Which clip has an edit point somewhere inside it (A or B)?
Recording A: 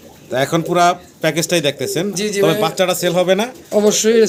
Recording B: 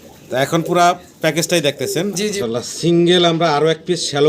B